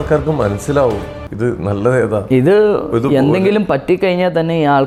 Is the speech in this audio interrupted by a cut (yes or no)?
no